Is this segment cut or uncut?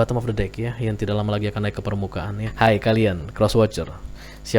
cut